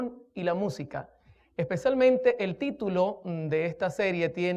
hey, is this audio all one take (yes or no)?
no